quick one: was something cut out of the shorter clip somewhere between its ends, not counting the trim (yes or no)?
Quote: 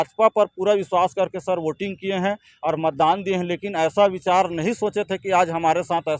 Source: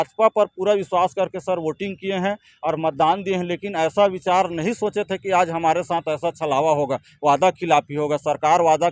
no